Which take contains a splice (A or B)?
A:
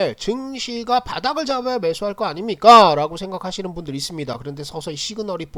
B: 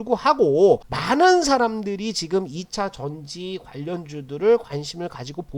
B